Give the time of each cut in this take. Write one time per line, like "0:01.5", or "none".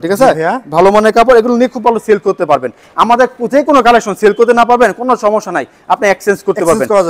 none